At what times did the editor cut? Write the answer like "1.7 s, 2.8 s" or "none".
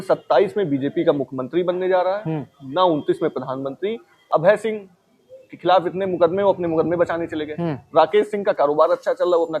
4.1 s